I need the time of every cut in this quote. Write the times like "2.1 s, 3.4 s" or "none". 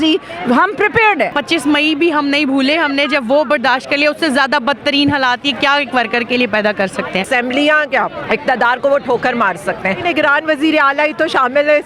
1.4 s, 7.3 s, 8.2 s, 10.0 s